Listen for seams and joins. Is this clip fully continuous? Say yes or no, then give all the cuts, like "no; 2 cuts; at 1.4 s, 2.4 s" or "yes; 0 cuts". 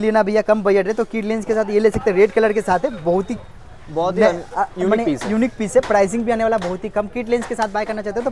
yes; 0 cuts